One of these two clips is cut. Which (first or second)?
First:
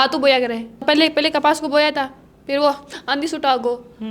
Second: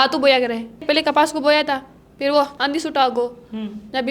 second